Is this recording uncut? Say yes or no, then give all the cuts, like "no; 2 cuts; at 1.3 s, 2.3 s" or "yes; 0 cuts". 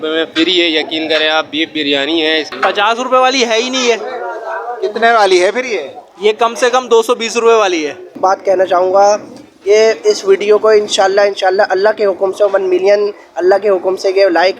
no; 2 cuts; at 2.5 s, 8.1 s